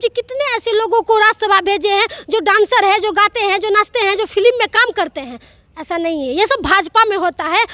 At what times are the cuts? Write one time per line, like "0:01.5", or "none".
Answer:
none